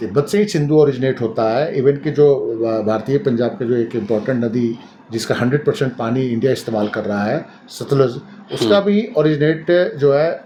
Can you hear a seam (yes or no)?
no